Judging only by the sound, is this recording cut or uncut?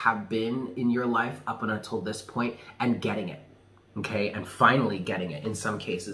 uncut